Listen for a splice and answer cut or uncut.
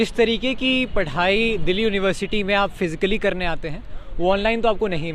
uncut